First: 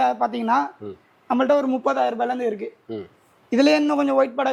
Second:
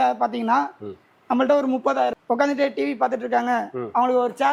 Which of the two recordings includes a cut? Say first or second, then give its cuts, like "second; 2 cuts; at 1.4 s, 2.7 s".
second; 1 cut; at 2.1 s